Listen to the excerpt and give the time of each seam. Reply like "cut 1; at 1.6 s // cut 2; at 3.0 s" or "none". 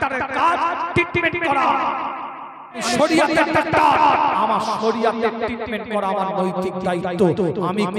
cut 1; at 2.8 s